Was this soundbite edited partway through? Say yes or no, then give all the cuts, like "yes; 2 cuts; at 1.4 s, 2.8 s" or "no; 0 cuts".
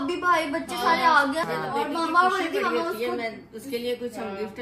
yes; 1 cut; at 1.5 s